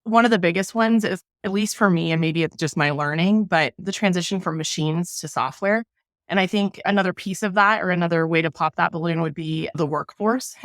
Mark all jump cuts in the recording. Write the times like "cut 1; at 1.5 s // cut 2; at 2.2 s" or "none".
cut 1; at 1.4 s // cut 2; at 3.8 s // cut 3; at 6.8 s // cut 4; at 9.8 s